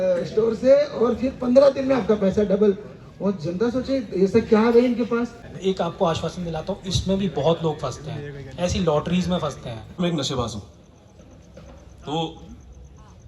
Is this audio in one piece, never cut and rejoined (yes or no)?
no